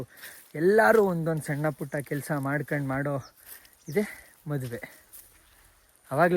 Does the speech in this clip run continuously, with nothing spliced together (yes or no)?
yes